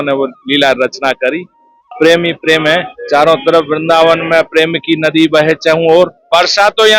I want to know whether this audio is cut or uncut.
cut